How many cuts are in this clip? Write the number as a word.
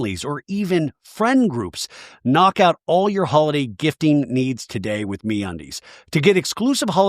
one